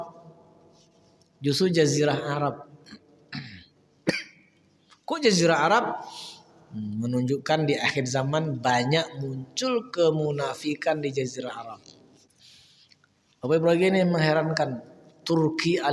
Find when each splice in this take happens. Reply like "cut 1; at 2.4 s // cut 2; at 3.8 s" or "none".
cut 1; at 12.3 s